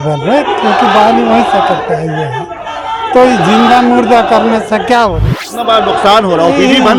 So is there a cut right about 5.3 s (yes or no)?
yes